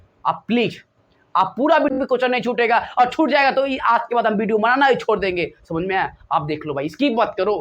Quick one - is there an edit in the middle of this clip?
yes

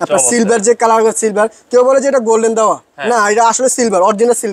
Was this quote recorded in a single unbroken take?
yes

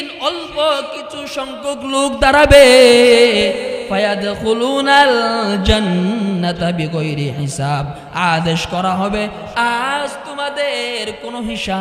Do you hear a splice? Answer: no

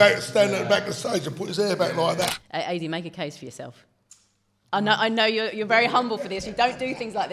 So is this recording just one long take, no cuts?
no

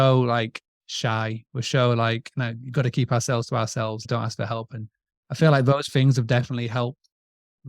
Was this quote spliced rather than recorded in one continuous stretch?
yes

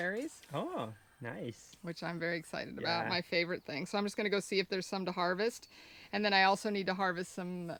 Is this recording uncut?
yes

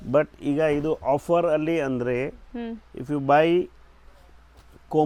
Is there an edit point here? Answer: no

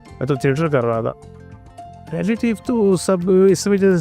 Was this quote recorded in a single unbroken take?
no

